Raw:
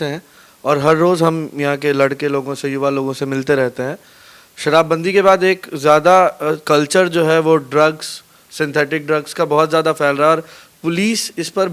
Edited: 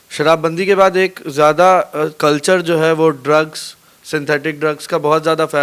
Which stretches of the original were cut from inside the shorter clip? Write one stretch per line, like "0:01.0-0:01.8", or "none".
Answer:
none